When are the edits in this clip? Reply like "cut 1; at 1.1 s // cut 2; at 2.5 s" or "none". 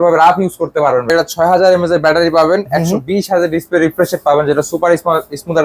cut 1; at 1.1 s